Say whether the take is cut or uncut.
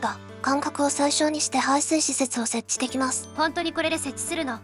cut